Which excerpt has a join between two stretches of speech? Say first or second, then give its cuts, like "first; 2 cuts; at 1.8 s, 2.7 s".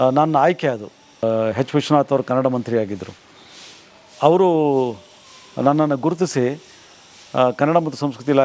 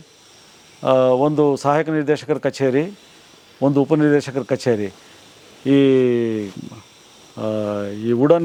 first; 1 cut; at 1.2 s